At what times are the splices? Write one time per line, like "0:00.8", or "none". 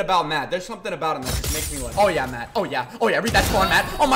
0:01.9